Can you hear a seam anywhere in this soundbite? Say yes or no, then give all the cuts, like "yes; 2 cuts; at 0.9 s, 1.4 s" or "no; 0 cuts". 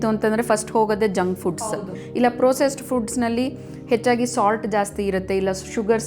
yes; 1 cut; at 1.6 s